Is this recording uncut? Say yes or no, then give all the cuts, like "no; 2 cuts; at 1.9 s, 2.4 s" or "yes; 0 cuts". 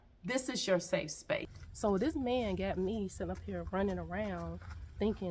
no; 1 cut; at 1.5 s